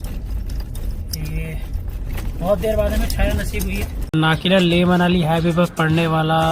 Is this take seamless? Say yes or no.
no